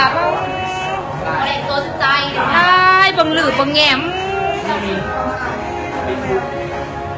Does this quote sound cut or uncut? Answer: cut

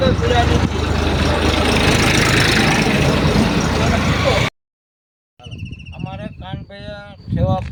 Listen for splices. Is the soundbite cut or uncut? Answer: uncut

